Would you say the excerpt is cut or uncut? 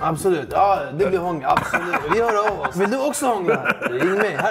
cut